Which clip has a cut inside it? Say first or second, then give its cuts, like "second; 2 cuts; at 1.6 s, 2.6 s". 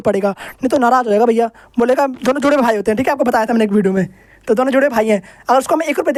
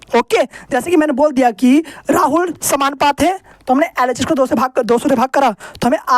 second; 1 cut; at 3.5 s